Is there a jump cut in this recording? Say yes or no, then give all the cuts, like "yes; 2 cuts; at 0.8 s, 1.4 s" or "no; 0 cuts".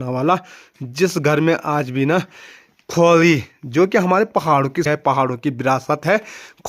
yes; 1 cut; at 4.9 s